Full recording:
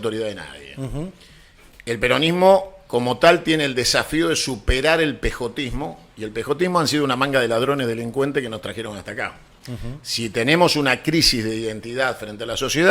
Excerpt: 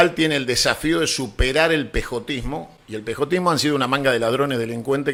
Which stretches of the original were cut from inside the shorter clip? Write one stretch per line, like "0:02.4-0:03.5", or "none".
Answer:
none